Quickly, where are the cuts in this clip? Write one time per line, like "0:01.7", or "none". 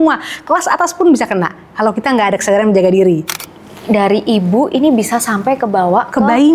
0:03.5